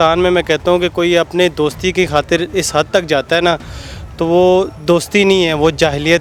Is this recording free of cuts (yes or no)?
yes